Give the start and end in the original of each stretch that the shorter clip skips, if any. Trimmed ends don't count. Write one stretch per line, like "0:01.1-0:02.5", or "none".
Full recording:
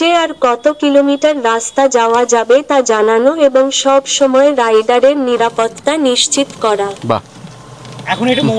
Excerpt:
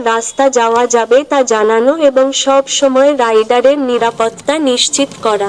none